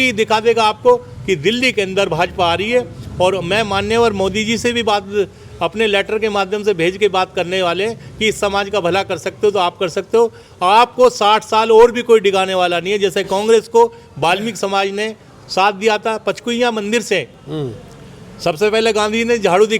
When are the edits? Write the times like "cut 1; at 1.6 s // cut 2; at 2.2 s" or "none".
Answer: none